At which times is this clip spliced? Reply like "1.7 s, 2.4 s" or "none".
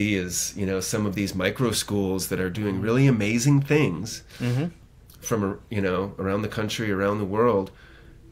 4.8 s